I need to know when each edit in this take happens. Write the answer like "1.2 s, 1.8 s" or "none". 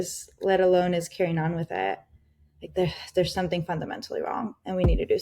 none